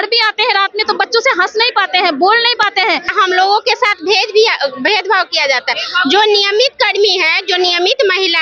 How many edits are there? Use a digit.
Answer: 1